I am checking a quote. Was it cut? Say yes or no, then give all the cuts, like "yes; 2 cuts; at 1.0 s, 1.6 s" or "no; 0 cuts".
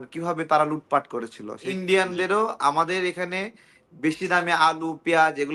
yes; 1 cut; at 1.7 s